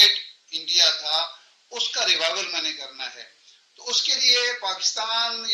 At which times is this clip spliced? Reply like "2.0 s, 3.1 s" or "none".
none